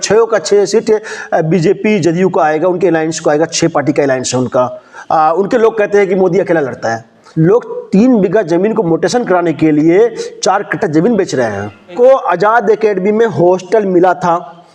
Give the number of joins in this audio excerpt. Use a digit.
2